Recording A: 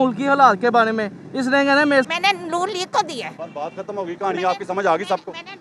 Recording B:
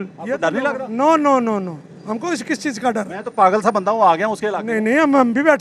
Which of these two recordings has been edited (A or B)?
A